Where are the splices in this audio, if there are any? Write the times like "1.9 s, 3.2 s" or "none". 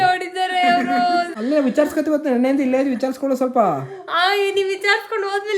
1.3 s